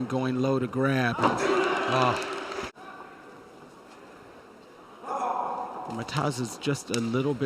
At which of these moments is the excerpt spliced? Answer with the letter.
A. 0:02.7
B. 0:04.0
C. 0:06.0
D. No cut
A